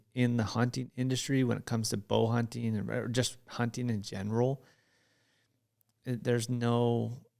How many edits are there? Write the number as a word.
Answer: zero